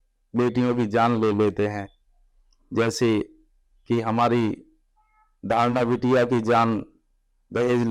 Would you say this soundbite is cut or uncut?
uncut